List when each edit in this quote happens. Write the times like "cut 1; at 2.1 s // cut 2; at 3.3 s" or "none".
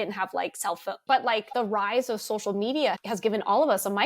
cut 1; at 1.0 s

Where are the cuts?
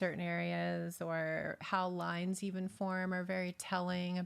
none

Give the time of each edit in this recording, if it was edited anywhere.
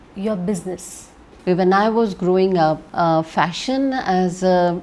cut 1; at 1.3 s // cut 2; at 2.9 s

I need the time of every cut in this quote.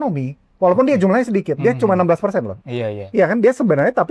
none

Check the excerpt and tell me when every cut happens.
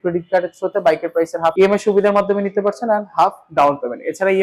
cut 1; at 1.5 s

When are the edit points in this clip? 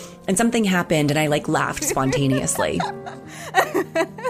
cut 1; at 2.8 s

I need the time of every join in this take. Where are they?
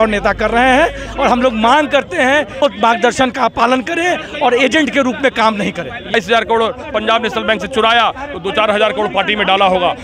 cut 1; at 2.6 s // cut 2; at 6.1 s

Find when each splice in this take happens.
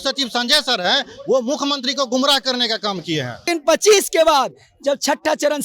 cut 1; at 3.5 s

